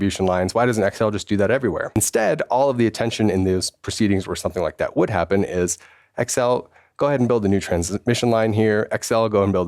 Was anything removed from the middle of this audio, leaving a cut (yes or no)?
yes